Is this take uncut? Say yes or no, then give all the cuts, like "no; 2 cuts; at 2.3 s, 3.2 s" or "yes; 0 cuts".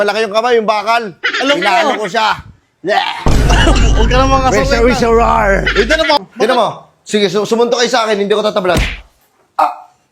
no; 1 cut; at 6.2 s